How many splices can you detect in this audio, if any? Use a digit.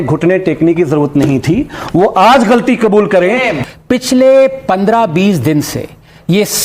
1